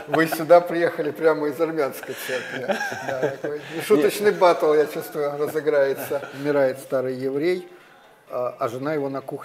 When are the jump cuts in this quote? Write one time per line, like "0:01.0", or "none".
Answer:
0:06.3